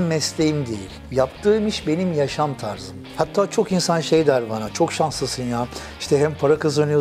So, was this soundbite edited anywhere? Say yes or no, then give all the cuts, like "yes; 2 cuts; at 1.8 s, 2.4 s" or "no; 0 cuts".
no; 0 cuts